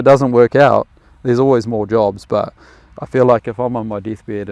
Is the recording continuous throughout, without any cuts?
yes; 0 cuts

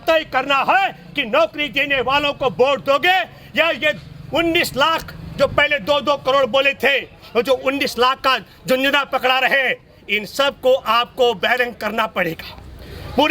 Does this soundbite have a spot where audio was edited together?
no; 0 cuts

